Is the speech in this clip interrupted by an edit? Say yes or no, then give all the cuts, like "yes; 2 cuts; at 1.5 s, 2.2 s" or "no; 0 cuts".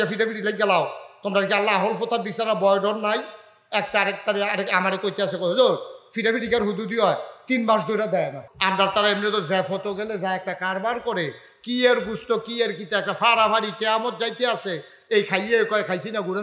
yes; 1 cut; at 8.5 s